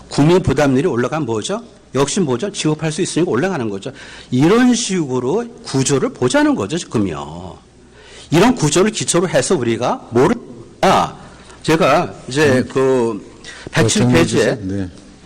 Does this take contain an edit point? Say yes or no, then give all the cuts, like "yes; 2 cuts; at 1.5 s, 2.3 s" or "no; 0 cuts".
yes; 1 cut; at 3.1 s